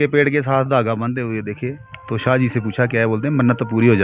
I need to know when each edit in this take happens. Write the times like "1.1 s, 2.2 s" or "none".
none